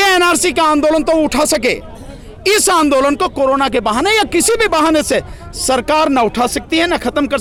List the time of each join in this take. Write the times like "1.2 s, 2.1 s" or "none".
none